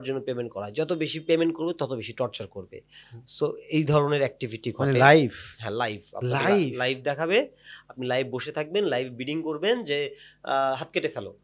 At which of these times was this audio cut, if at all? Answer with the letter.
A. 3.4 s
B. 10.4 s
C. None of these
C